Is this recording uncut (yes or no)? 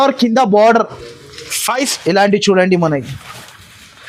no